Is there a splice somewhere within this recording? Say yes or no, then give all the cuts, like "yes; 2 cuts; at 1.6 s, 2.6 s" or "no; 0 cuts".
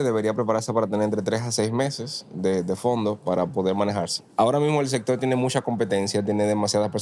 yes; 1 cut; at 4.2 s